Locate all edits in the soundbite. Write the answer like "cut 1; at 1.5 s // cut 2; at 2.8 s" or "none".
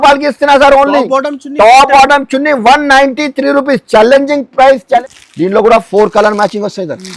cut 1; at 5.0 s